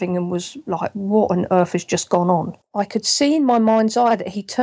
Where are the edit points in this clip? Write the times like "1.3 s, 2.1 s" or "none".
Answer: 2.6 s